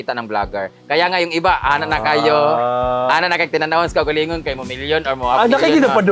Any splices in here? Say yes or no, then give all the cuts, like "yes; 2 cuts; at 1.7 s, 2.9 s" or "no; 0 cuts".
no; 0 cuts